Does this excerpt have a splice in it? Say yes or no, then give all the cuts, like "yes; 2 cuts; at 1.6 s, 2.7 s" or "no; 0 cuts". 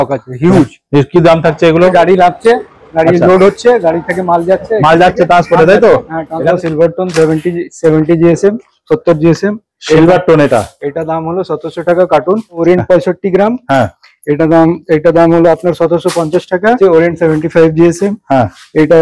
yes; 4 cuts; at 1.9 s, 6.5 s, 12.6 s, 16.8 s